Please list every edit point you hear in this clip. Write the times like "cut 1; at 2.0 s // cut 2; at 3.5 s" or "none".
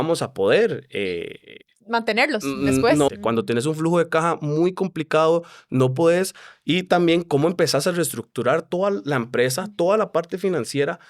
cut 1; at 3.1 s